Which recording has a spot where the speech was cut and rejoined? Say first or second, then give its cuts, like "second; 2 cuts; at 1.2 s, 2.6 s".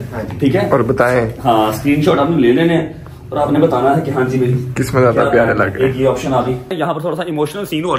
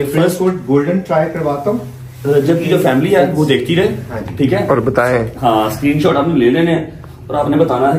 first; 1 cut; at 6.7 s